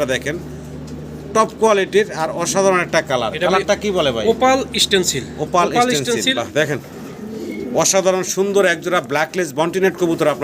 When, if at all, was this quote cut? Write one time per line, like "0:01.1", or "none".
0:06.4